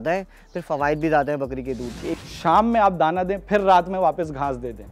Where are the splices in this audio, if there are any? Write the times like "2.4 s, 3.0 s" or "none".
2.1 s